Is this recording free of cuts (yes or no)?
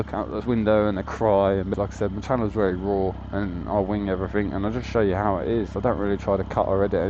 no